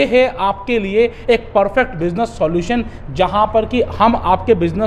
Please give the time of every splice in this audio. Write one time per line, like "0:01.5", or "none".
none